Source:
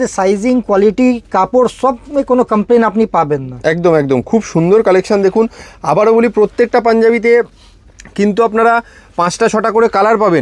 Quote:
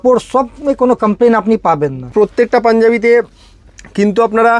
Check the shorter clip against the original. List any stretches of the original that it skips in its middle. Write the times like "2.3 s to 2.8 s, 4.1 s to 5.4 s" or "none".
3.6 s to 6.3 s